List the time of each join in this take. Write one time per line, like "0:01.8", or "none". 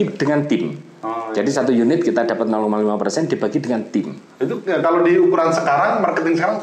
none